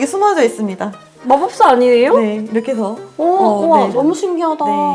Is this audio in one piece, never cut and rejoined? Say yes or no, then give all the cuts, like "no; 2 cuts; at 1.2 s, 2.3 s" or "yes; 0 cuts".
yes; 0 cuts